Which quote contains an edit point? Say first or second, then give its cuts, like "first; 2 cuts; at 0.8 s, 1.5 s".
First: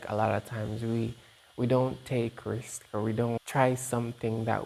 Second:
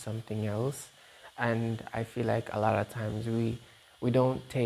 first; 1 cut; at 3.4 s